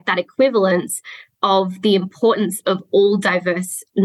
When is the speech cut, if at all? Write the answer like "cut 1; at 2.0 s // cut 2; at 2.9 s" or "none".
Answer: none